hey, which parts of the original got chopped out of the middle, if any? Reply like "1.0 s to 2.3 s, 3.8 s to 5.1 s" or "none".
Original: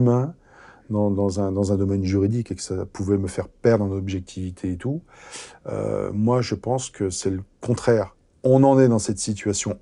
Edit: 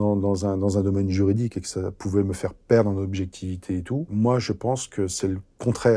5.0 s to 6.1 s